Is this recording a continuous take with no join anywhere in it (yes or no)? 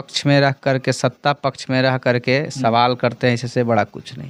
yes